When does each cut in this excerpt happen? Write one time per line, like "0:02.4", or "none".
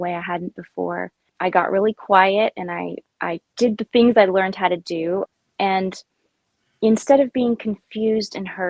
0:01.3
0:05.3

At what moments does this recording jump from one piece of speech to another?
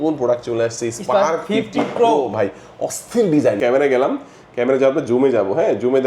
0:03.6

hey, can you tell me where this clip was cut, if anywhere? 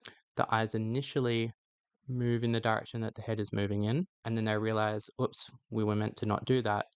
0:04.2

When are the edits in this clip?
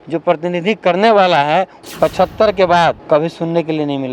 0:01.8
0:03.0

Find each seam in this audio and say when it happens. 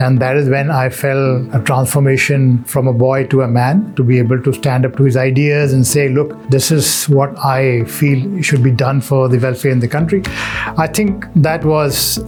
none

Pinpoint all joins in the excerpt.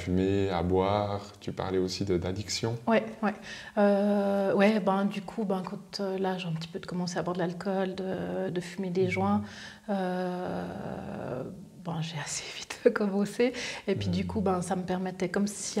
none

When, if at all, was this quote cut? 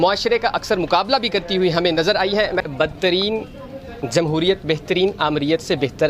0:02.6

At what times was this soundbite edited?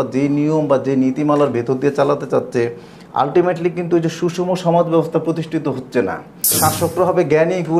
0:06.6

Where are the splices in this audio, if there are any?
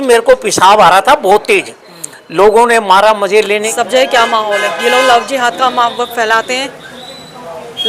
0:03.7

